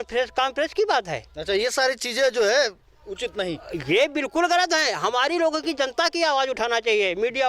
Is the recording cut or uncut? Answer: uncut